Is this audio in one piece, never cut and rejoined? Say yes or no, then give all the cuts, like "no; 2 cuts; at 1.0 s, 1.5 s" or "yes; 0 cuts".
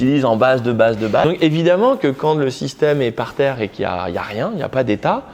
no; 1 cut; at 1.2 s